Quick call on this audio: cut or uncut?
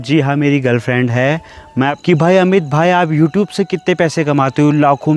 cut